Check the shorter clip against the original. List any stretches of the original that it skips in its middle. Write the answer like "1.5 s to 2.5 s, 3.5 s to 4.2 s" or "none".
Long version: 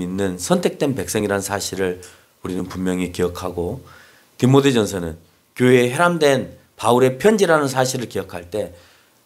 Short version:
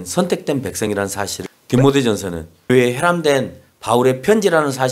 1.7 s to 4.1 s, 5.4 s to 5.7 s